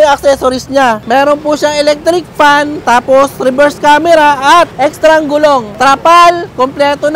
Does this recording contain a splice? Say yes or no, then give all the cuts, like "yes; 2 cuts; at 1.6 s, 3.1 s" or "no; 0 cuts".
yes; 3 cuts; at 1.0 s, 4.7 s, 5.7 s